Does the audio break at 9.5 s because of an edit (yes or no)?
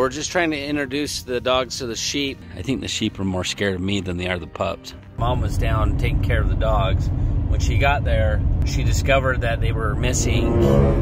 no